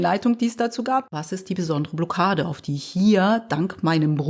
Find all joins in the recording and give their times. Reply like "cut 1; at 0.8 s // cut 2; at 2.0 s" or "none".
cut 1; at 1.1 s

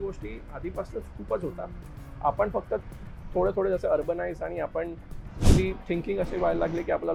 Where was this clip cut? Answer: none

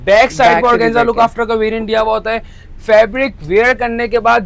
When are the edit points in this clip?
none

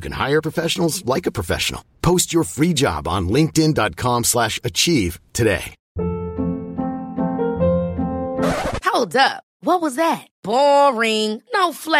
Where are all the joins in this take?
cut 1; at 5.8 s

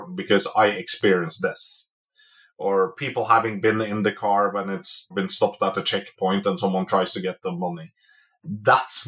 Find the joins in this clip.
cut 1; at 7.4 s

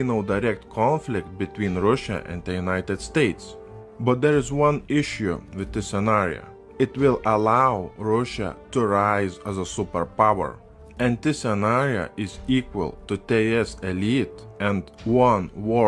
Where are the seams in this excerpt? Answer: cut 1; at 3.9 s

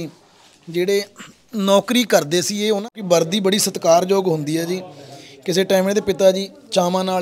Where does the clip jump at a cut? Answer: cut 1; at 2.9 s

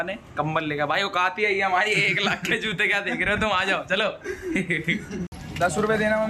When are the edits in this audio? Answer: none

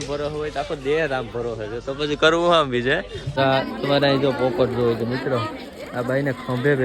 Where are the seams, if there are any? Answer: cut 1; at 3.3 s

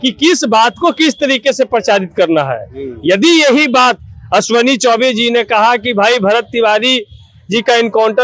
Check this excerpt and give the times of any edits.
none

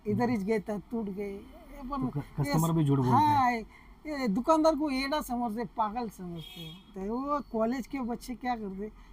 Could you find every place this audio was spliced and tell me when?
cut 1; at 6.9 s

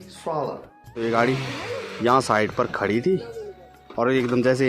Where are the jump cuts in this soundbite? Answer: cut 1; at 1.0 s

